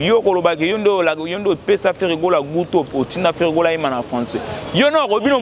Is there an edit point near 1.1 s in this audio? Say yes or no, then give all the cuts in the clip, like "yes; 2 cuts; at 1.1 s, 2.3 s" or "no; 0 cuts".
no; 0 cuts